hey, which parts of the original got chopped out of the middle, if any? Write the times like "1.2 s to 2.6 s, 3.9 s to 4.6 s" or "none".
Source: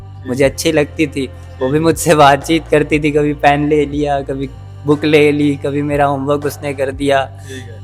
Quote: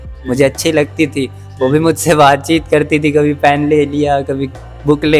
none